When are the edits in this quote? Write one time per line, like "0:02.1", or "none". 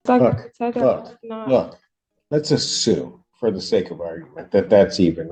none